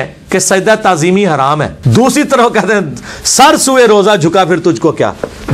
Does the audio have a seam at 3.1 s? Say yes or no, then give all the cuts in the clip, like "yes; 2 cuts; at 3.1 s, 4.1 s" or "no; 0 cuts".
no; 1 cut; at 1.8 s